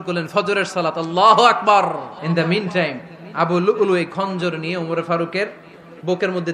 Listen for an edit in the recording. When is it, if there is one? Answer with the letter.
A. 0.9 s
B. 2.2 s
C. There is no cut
B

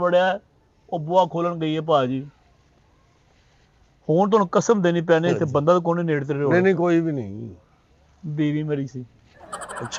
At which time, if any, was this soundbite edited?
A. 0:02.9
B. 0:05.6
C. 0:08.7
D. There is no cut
D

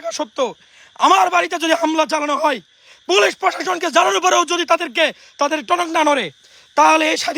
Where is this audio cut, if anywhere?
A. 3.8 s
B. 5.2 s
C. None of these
C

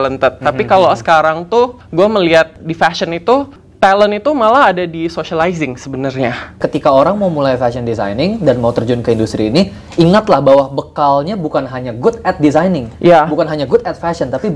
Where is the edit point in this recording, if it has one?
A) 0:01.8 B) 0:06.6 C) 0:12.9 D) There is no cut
B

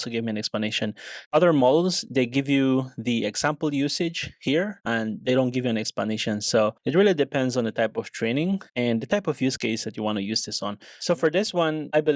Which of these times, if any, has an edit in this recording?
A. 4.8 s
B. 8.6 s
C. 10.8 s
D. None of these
C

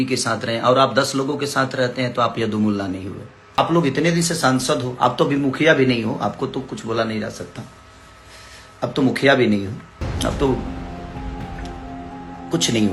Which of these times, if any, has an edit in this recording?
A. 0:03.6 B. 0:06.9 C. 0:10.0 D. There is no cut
A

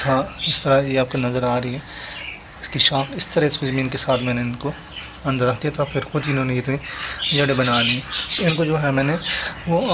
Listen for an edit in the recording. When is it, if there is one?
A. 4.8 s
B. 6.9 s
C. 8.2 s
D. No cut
C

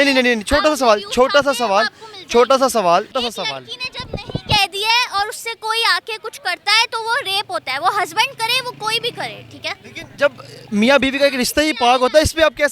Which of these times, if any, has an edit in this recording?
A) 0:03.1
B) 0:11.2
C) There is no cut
A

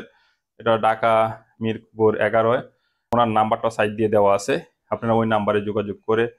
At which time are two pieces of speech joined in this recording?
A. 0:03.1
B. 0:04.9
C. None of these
A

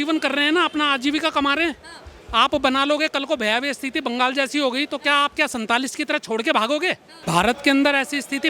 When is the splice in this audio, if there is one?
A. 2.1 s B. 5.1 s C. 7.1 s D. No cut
C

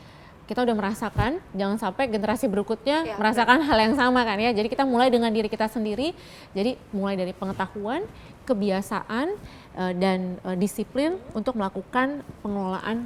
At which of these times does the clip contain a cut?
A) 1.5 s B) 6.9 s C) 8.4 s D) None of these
D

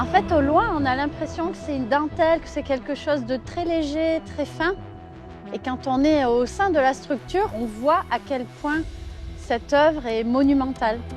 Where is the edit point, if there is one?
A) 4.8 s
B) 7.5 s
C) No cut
B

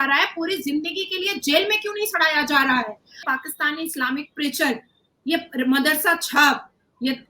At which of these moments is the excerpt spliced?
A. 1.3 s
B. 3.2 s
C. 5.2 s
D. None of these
B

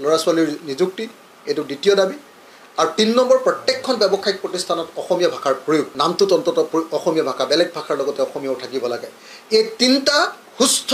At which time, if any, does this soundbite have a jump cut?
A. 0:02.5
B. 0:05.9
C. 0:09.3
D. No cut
B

